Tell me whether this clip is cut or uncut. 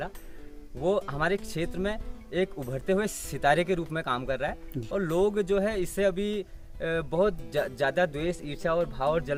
uncut